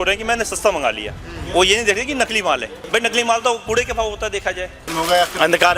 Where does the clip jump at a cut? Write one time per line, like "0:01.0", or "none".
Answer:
0:02.7
0:04.9